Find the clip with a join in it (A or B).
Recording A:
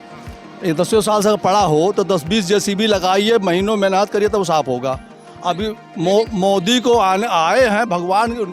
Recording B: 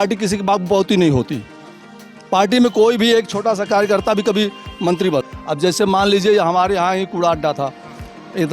B